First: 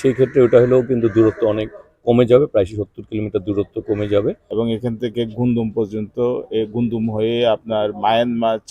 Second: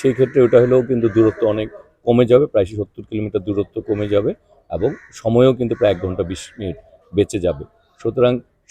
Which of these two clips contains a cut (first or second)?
first